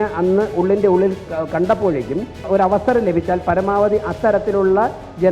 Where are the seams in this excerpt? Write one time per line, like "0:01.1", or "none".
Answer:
0:01.2
0:02.4